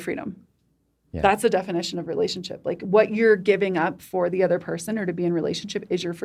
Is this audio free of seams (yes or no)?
yes